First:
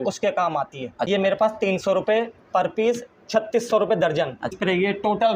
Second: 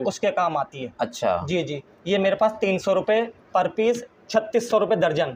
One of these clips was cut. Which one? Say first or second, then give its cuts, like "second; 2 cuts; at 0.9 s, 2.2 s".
first; 2 cuts; at 1.1 s, 4.5 s